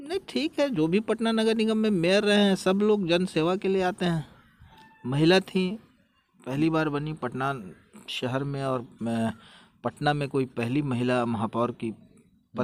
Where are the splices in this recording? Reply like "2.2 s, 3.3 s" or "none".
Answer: none